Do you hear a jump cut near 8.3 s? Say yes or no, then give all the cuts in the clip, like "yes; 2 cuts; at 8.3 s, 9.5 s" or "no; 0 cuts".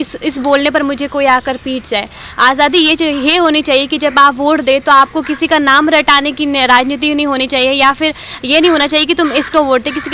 no; 0 cuts